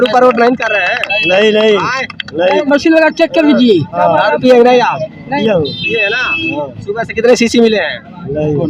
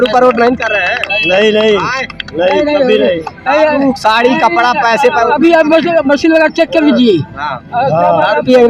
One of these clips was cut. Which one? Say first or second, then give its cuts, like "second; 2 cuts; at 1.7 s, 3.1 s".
first; 3 cuts; at 2.6 s, 3.9 s, 5.4 s